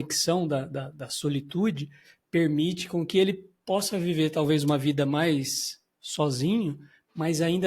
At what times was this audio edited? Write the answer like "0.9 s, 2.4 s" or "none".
none